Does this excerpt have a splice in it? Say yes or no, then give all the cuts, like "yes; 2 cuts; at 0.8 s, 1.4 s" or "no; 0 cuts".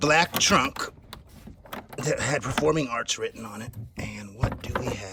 no; 0 cuts